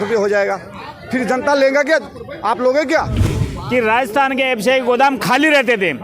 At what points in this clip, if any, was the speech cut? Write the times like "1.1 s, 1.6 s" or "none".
3.3 s